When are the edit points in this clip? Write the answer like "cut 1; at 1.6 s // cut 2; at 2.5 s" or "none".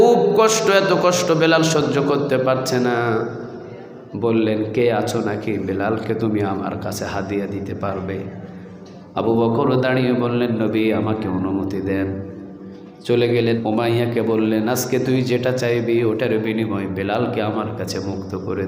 cut 1; at 13.6 s